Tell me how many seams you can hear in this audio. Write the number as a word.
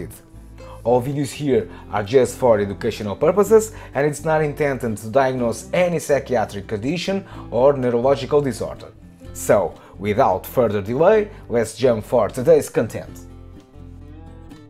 one